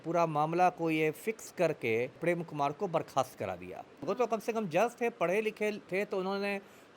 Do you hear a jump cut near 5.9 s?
no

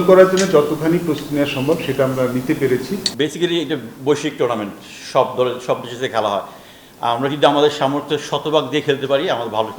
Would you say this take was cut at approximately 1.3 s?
no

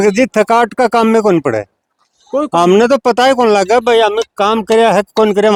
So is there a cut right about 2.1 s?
no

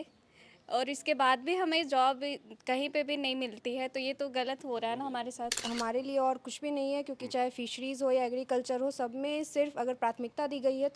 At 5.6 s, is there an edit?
yes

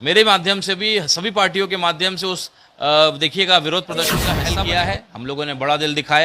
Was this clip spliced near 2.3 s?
no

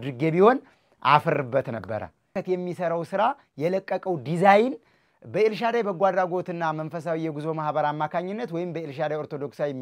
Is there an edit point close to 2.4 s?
yes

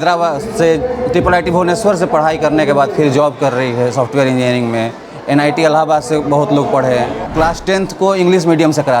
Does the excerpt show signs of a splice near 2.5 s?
no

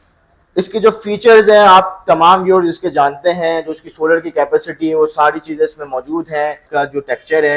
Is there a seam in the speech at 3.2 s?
no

